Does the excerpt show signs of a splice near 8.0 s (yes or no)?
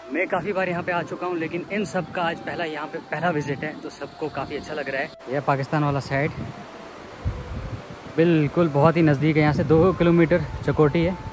no